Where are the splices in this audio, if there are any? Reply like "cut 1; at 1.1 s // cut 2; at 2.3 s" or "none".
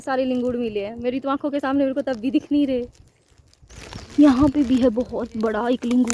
none